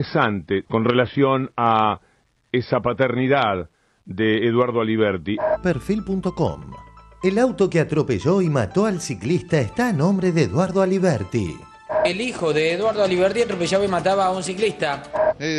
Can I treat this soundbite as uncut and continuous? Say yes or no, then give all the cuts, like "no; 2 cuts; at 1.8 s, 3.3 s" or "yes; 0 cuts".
yes; 0 cuts